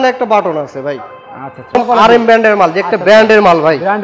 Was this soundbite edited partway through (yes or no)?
yes